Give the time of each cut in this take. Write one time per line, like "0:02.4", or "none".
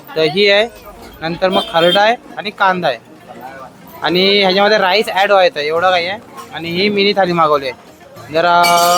none

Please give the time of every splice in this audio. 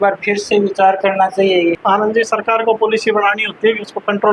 0:01.8

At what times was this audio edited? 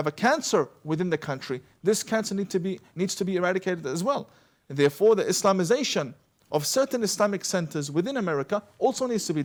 none

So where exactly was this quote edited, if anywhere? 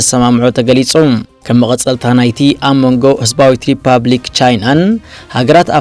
0:01.3

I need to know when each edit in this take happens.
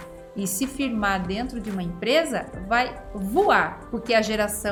none

